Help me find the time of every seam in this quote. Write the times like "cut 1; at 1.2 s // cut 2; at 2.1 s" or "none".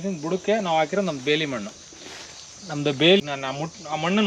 cut 1; at 3.2 s